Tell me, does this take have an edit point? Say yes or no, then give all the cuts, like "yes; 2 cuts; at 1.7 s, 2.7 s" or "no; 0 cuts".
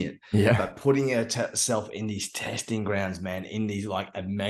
no; 0 cuts